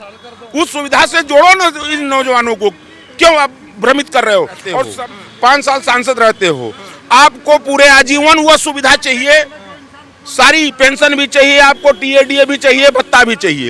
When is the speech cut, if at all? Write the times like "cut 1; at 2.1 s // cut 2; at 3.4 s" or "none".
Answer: cut 1; at 4.9 s